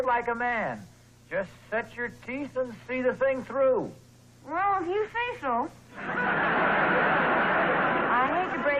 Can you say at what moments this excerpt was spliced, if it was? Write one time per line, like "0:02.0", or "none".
0:04.4